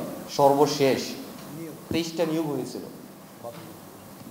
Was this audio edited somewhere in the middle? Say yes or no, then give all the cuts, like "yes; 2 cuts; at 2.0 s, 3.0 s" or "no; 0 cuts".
no; 0 cuts